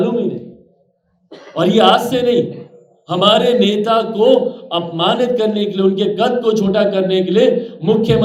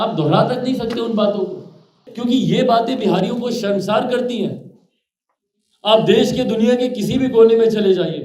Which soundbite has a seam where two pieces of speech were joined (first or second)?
second